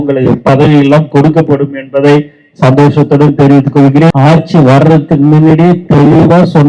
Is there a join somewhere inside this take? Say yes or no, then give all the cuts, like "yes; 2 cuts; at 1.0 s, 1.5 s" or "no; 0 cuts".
yes; 1 cut; at 4.1 s